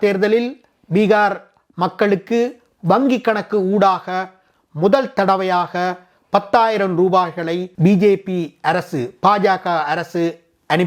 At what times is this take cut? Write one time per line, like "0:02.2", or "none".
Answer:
none